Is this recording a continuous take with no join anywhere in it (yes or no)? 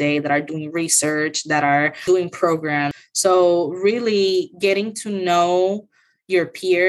no